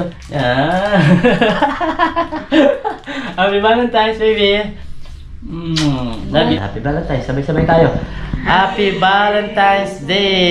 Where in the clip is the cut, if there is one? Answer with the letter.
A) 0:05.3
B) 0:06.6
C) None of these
B